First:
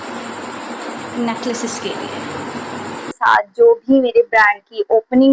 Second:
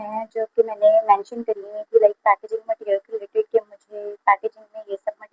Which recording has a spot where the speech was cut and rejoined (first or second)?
first